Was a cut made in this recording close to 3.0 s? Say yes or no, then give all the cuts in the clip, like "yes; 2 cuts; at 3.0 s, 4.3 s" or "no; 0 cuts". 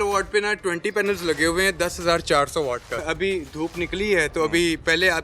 yes; 1 cut; at 3.0 s